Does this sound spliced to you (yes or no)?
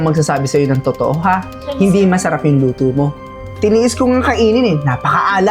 no